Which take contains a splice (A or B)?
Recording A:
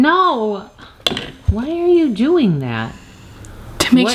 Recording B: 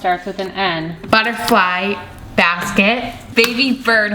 B